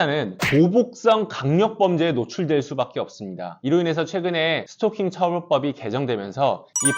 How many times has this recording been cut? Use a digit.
1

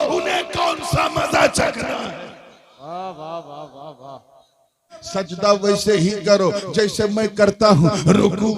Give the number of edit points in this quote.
1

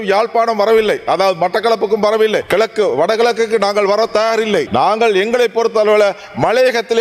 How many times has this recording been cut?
2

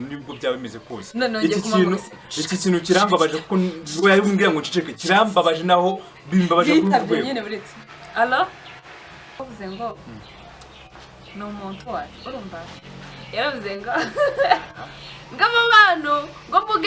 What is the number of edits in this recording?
1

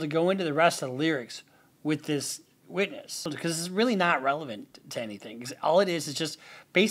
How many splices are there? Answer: 1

